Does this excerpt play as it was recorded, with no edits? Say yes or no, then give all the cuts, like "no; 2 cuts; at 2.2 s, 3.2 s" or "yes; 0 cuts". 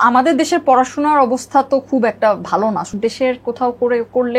no; 1 cut; at 2.9 s